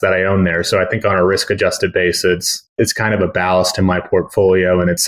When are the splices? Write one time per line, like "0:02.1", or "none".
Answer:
0:02.6